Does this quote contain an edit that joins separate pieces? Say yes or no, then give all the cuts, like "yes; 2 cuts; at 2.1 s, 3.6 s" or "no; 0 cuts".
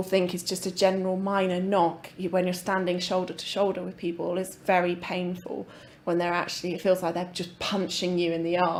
no; 0 cuts